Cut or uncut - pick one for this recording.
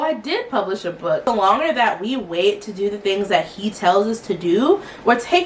cut